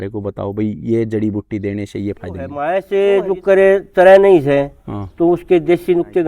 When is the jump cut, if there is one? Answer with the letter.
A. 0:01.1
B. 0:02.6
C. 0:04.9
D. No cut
B